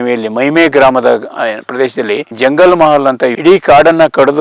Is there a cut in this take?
yes; 2 cuts; at 2.3 s, 3.3 s

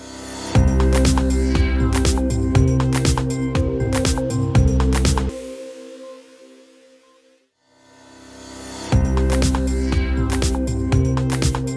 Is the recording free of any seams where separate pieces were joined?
no; 1 cut; at 7.1 s

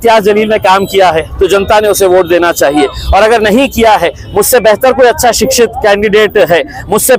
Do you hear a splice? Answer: no; 0 cuts

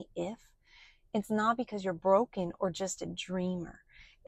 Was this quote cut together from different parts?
no; 0 cuts

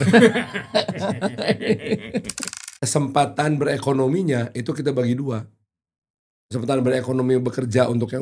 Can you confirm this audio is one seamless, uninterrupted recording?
no; 1 cut; at 2.4 s

